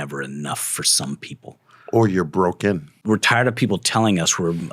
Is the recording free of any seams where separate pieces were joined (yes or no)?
no